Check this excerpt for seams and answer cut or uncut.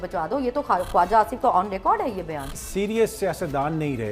cut